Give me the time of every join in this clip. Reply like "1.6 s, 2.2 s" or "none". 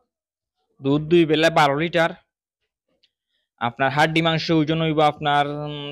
none